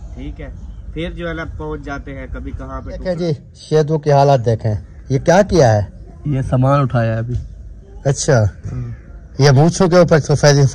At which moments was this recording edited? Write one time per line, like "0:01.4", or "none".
0:02.9